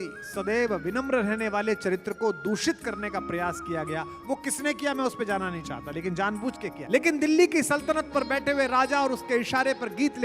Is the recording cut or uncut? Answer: cut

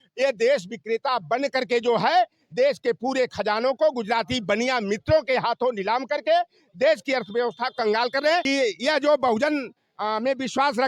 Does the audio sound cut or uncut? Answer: cut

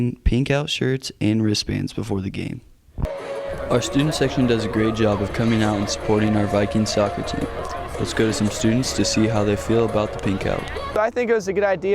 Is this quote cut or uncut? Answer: cut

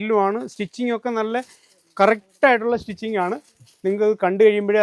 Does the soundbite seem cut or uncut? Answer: uncut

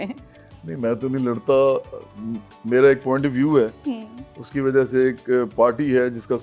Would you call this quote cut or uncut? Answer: uncut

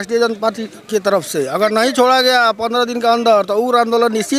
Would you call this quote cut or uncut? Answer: uncut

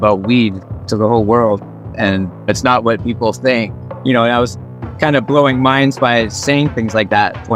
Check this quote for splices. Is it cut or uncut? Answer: uncut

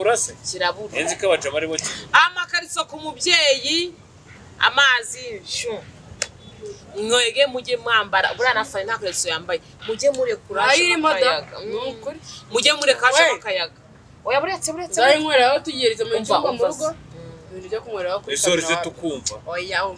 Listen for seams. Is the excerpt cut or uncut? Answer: uncut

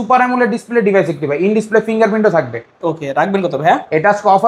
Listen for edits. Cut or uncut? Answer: uncut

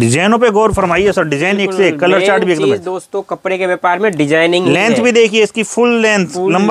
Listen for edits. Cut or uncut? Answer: uncut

